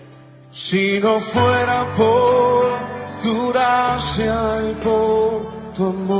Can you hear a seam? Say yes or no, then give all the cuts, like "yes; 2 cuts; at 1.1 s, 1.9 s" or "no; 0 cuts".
no; 0 cuts